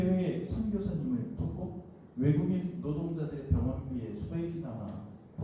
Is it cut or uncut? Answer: uncut